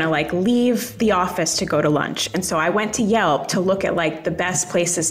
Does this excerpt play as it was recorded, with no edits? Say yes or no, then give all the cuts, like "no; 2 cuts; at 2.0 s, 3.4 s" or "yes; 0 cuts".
yes; 0 cuts